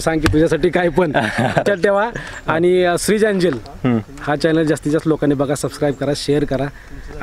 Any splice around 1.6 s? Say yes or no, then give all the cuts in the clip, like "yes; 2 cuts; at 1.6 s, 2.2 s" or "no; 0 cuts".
yes; 1 cut; at 1.6 s